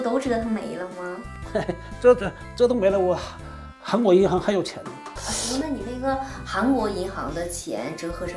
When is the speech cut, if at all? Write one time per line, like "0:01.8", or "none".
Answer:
0:05.0